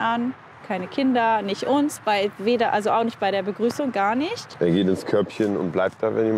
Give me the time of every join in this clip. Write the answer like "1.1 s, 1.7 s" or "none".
none

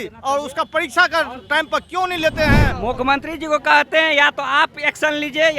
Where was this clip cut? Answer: 2.7 s

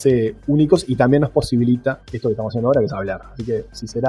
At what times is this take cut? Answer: 2.1 s

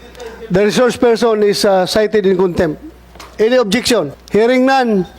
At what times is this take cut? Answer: 4.1 s

